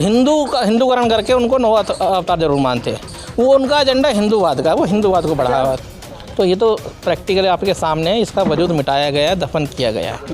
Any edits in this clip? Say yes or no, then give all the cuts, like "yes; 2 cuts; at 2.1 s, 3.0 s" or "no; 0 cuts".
yes; 1 cut; at 5.8 s